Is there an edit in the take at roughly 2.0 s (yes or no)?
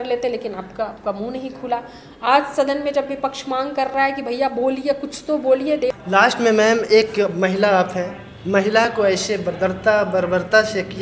no